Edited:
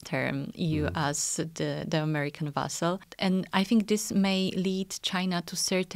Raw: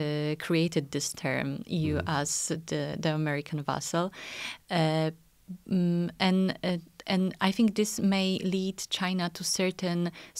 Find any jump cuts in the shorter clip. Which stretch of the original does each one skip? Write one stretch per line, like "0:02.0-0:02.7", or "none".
0:04.2-0:07.0